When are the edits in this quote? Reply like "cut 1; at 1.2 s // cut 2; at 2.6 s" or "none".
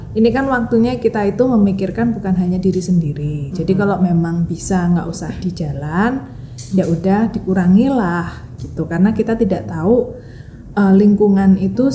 none